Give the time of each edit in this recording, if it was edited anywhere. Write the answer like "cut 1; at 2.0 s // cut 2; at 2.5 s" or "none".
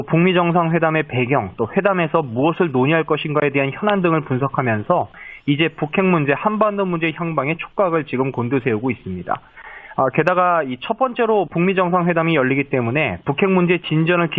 cut 1; at 1.9 s